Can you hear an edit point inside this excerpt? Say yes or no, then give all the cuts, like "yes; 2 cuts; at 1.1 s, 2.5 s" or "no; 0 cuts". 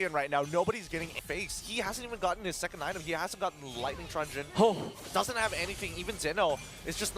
yes; 1 cut; at 1.2 s